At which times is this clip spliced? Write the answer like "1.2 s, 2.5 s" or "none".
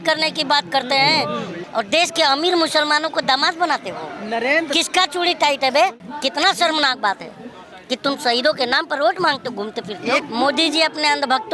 1.5 s, 6.1 s, 10.2 s